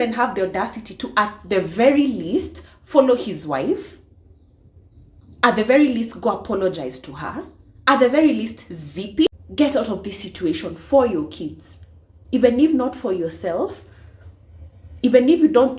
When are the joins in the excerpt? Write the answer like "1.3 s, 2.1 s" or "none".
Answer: 9.3 s

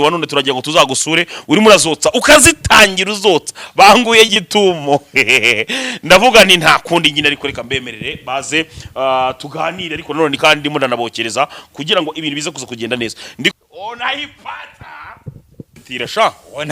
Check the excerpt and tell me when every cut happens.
13.5 s, 15.8 s

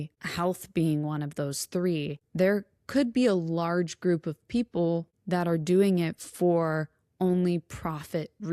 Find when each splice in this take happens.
none

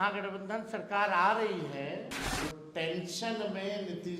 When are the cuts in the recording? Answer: 2.3 s

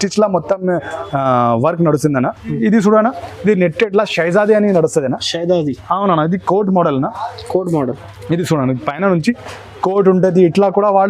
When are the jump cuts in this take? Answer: 2.5 s

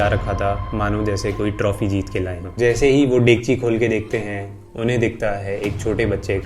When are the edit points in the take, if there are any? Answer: 2.6 s

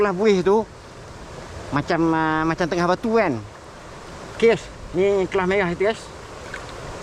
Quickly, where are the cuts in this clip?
none

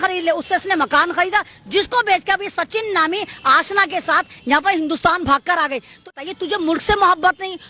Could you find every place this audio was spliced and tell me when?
6.1 s

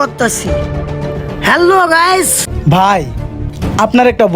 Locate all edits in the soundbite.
2.4 s

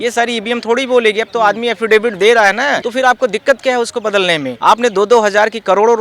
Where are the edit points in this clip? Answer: 2.8 s, 4.5 s

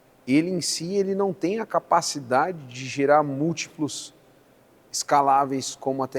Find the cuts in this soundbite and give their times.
none

